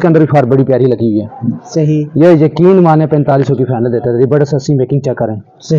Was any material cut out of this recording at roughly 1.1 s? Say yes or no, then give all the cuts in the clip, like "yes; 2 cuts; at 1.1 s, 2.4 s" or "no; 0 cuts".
no; 0 cuts